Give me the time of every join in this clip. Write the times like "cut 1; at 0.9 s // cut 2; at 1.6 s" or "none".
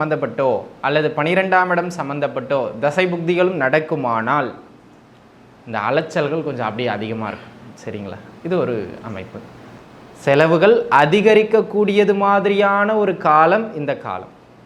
cut 1; at 9.8 s